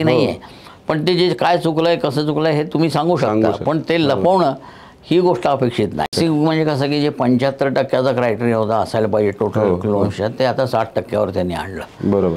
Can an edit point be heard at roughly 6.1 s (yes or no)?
yes